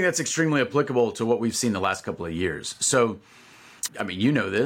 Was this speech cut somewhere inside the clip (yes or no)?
no